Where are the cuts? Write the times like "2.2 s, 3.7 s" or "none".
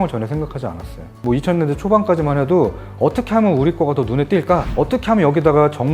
1.1 s, 4.7 s